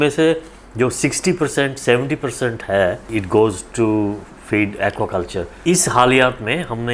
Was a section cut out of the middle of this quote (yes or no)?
yes